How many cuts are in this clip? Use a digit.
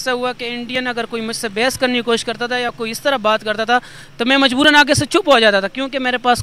0